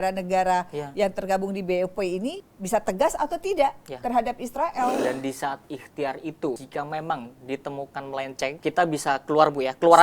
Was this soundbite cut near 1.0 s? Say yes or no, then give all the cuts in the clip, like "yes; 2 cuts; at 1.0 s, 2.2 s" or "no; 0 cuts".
no; 4 cuts; at 2.5 s, 5.0 s, 6.6 s, 8.6 s